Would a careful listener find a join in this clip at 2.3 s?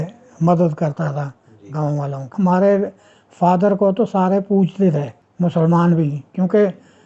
yes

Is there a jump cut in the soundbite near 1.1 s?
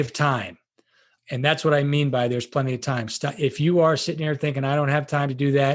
yes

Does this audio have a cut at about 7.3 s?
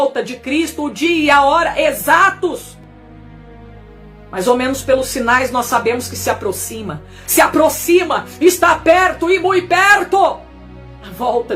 no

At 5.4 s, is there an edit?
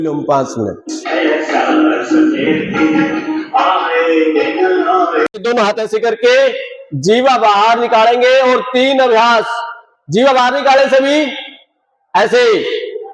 yes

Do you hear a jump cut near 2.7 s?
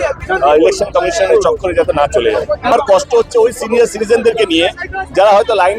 yes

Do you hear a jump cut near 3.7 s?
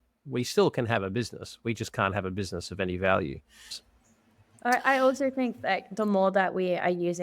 yes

